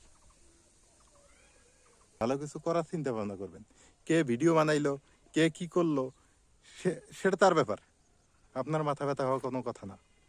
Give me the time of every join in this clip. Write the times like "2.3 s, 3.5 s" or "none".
2.2 s